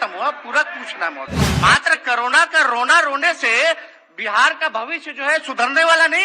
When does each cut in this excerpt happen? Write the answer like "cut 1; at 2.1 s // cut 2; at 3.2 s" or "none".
cut 1; at 1.5 s